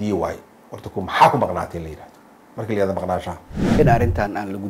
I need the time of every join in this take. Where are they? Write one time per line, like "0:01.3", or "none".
0:03.6